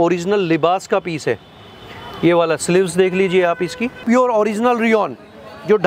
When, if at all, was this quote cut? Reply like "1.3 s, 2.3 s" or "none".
4.0 s